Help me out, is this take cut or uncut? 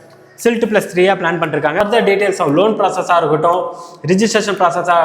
cut